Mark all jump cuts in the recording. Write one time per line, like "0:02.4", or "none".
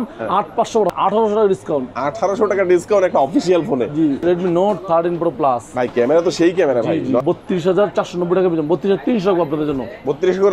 0:00.9
0:04.2
0:07.2